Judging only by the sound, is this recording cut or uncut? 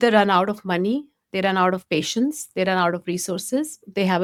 uncut